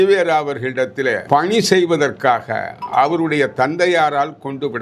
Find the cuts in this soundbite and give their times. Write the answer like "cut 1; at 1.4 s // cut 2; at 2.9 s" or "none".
cut 1; at 1.2 s